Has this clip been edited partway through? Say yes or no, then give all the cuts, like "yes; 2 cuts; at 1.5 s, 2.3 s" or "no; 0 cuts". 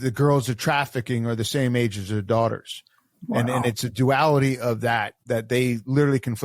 no; 0 cuts